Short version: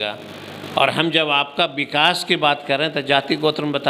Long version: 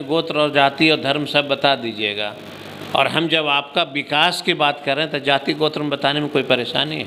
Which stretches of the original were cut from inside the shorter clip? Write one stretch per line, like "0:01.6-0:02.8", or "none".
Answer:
none